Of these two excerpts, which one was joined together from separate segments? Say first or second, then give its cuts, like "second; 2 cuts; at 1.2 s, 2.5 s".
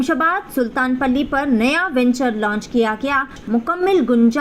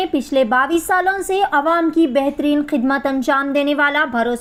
first; 1 cut; at 3.4 s